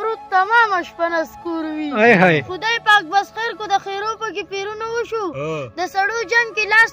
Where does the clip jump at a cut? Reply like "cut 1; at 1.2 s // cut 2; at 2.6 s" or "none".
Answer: cut 1; at 2.5 s